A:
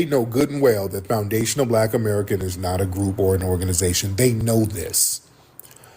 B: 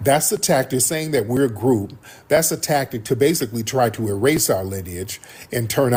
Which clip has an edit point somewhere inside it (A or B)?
A